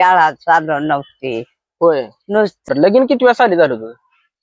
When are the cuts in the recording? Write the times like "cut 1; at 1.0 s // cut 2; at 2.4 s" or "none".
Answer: cut 1; at 2.7 s